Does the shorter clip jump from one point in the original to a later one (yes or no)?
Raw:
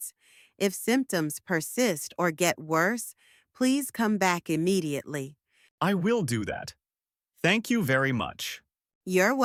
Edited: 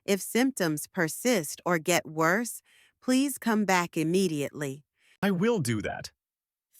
yes